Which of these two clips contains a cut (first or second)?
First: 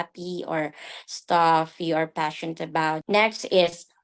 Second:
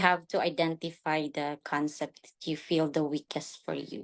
first